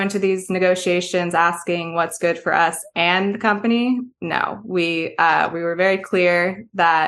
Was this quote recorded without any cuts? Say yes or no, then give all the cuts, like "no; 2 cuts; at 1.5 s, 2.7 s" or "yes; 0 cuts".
yes; 0 cuts